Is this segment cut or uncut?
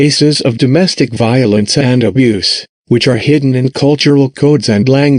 uncut